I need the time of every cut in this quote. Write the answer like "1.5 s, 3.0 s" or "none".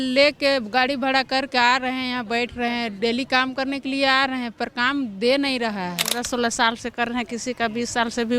6.2 s